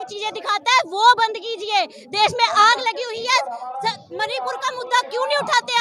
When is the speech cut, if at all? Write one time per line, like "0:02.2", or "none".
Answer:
none